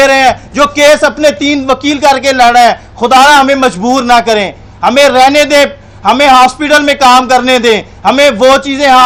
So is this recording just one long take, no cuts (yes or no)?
yes